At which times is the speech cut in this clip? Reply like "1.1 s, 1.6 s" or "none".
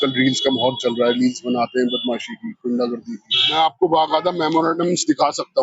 3.5 s

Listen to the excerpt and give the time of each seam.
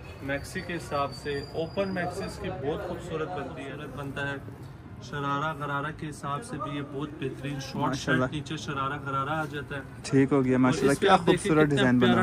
3.7 s

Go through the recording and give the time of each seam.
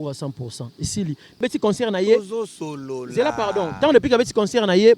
1.4 s

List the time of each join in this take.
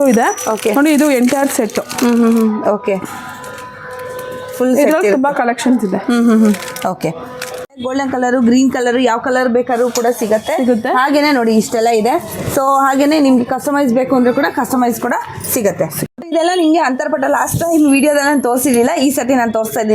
7.8 s, 16.2 s

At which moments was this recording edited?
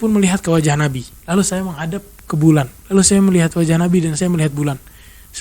1.1 s, 2.8 s

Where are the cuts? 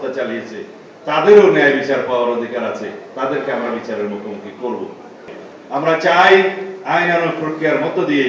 5.3 s

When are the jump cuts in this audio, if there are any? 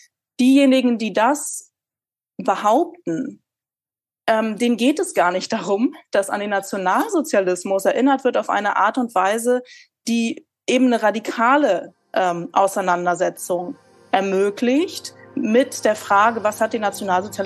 none

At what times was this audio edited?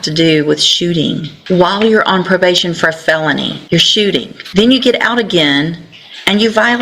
1.3 s, 3.6 s, 4.4 s

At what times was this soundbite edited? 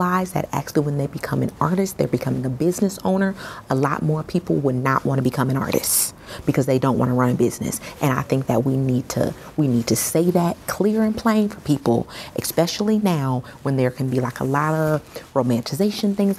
none

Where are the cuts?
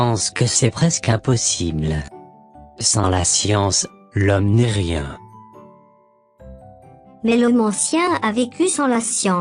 none

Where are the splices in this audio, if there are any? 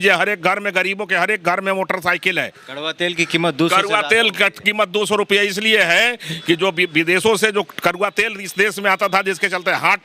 none

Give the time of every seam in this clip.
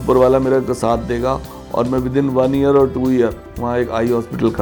none

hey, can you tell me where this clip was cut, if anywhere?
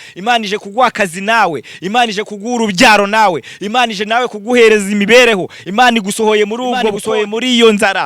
7.0 s

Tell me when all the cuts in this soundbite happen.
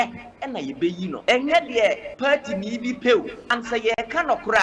1.2 s, 2.1 s, 3.4 s

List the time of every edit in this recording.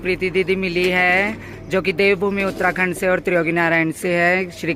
none

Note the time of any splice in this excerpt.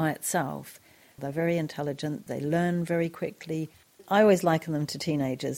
1.2 s, 2.2 s, 3.9 s

